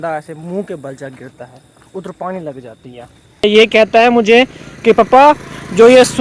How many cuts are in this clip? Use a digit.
1